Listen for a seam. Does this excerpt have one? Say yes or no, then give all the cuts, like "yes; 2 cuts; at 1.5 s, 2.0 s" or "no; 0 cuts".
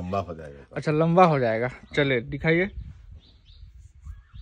no; 0 cuts